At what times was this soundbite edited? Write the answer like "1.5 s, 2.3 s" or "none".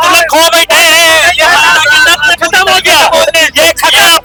none